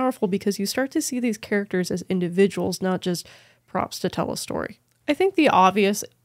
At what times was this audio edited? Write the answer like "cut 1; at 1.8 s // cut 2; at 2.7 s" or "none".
cut 1; at 4.8 s